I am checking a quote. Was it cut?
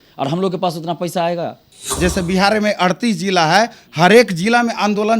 yes; 1 cut; at 1.9 s

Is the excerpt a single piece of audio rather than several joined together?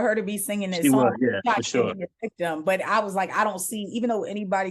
yes; 0 cuts

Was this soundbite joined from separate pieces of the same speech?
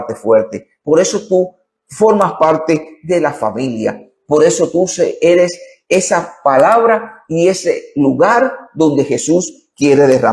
no; 0 cuts

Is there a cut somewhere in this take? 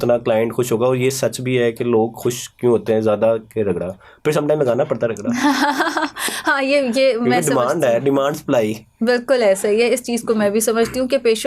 no; 0 cuts

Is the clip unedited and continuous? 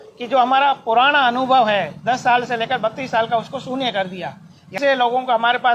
no; 1 cut; at 4.7 s

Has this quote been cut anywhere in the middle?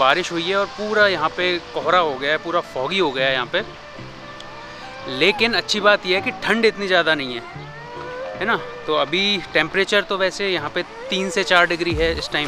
no; 0 cuts

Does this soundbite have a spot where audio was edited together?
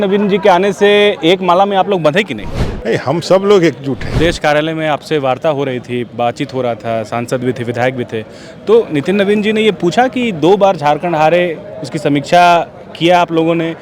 yes; 1 cut; at 4.0 s

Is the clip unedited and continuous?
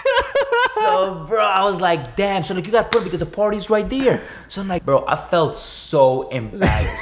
no; 1 cut; at 4.8 s

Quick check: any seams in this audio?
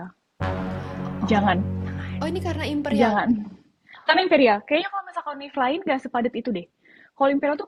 no; 0 cuts

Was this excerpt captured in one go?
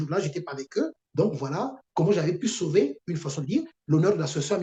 yes; 0 cuts

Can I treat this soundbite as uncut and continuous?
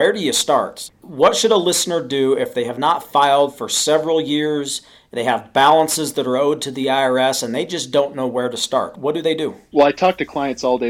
no; 1 cut; at 9.7 s

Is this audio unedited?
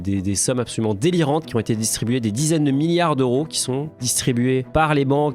yes; 0 cuts

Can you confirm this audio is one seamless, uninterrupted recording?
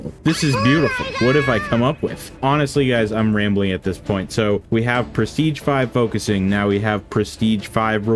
yes; 0 cuts

